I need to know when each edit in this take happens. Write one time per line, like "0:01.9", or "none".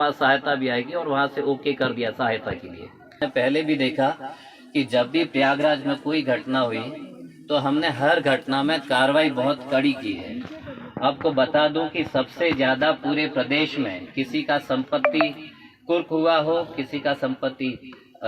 0:03.1